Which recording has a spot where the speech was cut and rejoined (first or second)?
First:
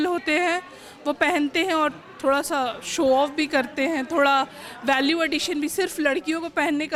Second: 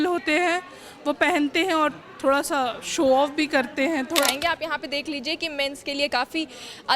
second